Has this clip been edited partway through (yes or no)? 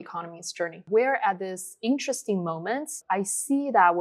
yes